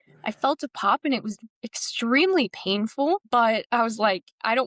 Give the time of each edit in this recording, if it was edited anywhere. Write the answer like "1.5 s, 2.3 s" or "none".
none